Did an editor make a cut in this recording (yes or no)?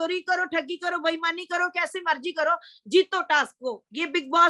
no